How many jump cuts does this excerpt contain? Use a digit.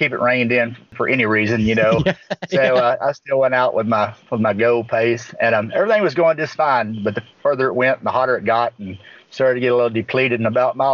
1